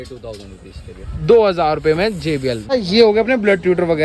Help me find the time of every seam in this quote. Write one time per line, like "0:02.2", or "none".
0:02.7